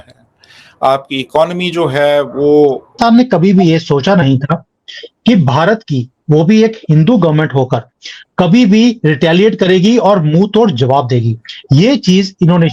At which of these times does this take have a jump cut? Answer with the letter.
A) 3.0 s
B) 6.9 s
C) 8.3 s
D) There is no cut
A